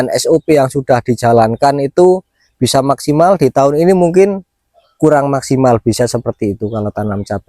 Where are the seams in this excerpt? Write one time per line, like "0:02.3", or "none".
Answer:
none